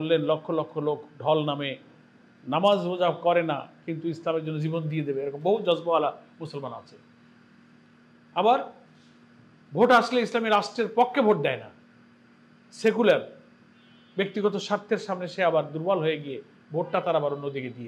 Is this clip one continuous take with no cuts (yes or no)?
yes